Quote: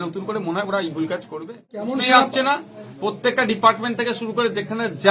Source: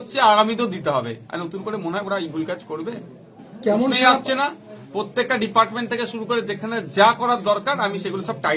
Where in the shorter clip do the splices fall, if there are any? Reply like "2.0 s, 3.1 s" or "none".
1.9 s